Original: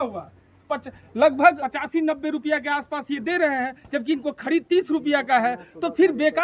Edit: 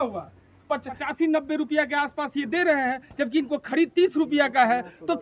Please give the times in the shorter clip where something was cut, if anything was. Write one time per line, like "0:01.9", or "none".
0:01.0